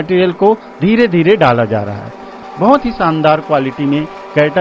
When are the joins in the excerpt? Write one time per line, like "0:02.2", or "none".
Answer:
0:02.3